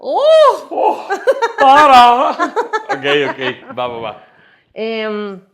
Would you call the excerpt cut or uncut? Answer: uncut